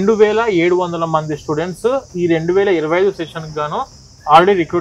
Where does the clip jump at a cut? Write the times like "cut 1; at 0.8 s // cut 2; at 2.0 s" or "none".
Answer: none